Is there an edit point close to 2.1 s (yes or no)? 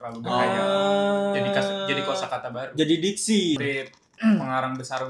no